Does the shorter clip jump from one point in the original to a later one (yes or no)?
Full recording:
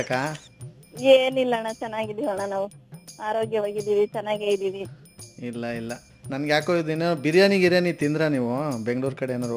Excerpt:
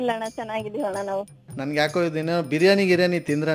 yes